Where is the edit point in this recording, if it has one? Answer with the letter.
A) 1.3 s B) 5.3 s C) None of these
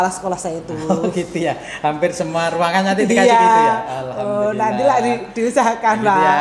C